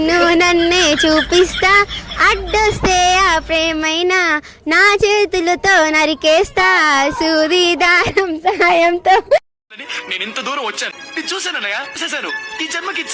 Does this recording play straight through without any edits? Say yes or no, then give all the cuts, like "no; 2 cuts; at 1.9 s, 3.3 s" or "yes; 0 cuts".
yes; 0 cuts